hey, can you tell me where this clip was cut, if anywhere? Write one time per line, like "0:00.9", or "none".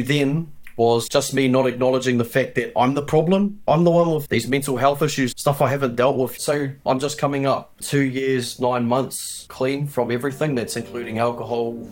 0:03.6
0:06.4